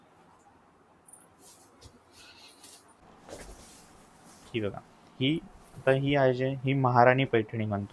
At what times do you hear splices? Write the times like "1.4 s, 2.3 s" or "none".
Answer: 3.0 s